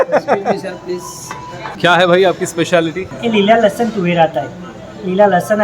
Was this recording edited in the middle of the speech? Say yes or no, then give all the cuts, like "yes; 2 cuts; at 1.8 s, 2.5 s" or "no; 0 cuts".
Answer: yes; 2 cuts; at 1.6 s, 3.1 s